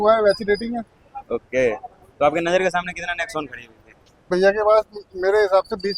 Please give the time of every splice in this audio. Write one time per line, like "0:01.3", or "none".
0:04.2